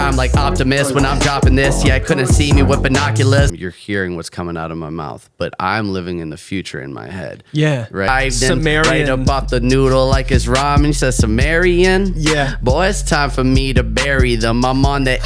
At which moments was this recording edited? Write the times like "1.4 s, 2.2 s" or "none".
3.6 s, 8.1 s